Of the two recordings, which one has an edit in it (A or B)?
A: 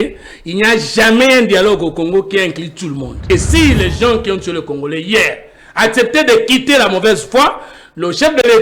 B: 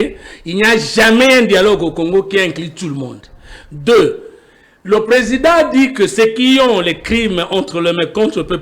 A